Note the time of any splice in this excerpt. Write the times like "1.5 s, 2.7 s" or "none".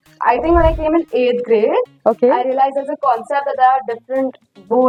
none